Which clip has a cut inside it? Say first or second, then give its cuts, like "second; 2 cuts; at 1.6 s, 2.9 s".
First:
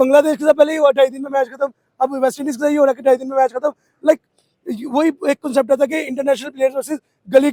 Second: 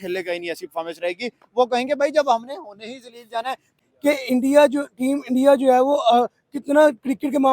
second; 1 cut; at 3.8 s